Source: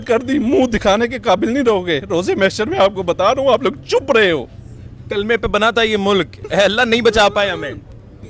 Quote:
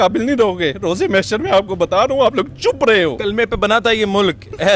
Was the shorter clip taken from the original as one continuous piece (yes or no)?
no